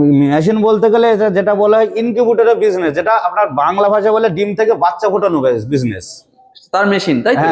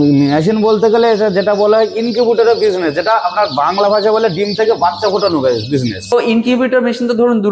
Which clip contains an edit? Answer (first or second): second